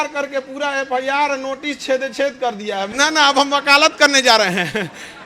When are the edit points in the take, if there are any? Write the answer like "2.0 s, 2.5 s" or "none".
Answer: 2.9 s